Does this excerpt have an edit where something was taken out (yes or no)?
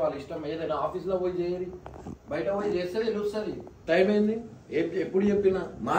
yes